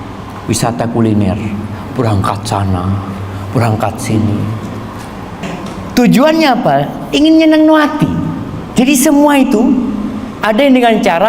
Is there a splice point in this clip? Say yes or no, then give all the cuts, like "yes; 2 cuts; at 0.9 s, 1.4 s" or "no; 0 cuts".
yes; 1 cut; at 5.4 s